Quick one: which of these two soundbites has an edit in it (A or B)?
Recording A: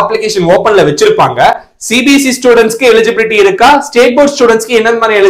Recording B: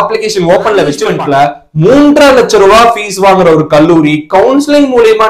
B